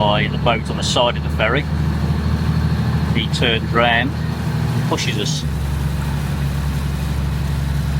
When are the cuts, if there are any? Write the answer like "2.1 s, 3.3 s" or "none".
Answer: none